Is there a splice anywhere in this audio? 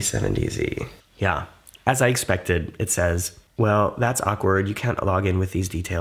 yes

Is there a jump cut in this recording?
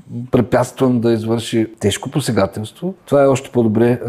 yes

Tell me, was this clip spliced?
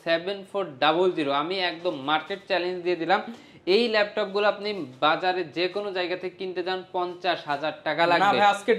no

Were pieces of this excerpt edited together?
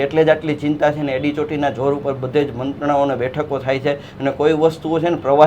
no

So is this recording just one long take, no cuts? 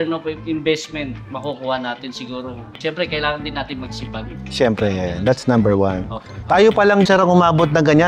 no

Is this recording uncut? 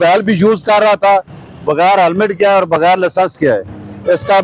yes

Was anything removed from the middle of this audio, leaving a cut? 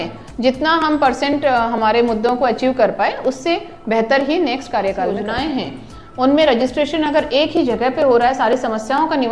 yes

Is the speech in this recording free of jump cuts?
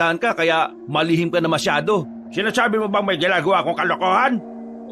yes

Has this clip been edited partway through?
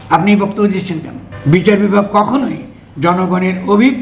yes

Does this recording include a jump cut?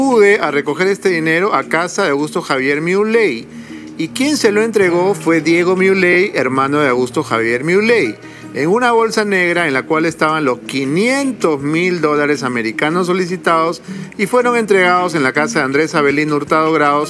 no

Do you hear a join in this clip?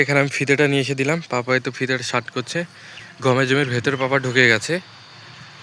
no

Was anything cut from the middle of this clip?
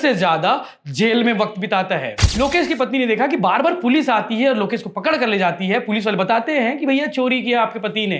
yes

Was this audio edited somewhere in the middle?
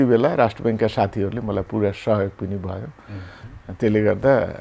no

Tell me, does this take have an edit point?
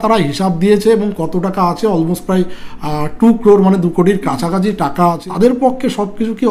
yes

